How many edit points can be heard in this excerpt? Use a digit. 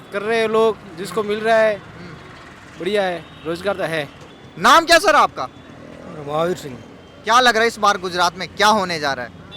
0